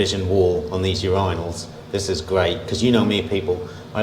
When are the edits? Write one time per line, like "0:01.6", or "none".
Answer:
none